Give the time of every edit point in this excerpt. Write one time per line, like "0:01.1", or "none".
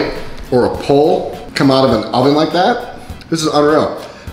0:01.4

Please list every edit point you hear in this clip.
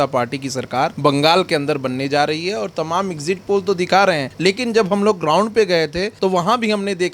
0:00.9
0:04.3
0:06.1

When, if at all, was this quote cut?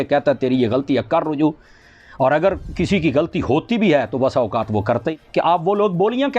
0:05.1

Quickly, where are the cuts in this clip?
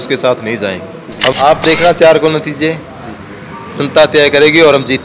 0:01.3

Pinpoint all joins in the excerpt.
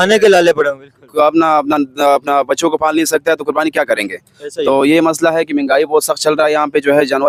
none

